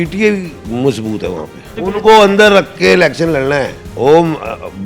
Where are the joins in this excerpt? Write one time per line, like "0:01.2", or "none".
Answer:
0:01.7
0:03.8

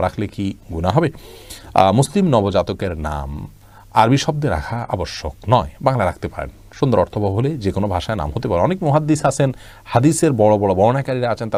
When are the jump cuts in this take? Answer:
none

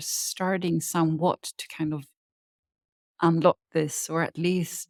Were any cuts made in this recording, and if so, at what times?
none

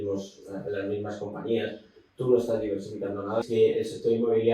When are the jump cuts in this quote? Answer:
0:03.4

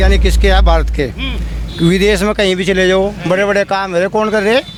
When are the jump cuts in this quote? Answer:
none

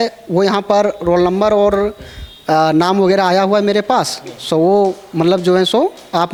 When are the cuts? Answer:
none

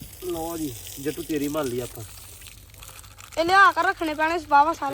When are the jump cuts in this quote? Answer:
none

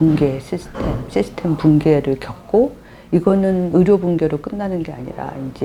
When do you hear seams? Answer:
none

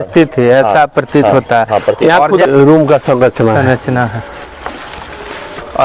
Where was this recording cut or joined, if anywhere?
0:02.5

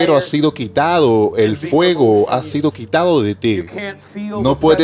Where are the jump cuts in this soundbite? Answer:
none

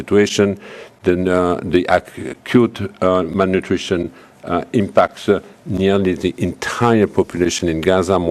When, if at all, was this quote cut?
none

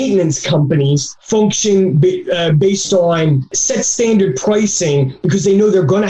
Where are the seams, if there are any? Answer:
0:01.1

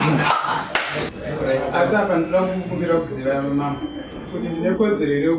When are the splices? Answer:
0:01.0

